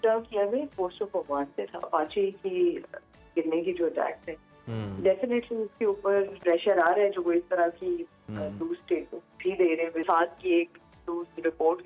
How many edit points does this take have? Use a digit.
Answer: 3